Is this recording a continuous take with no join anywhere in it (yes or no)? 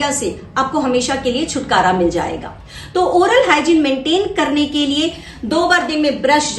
yes